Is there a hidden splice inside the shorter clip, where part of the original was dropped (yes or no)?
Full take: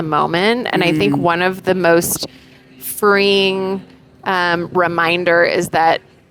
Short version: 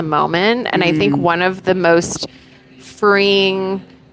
no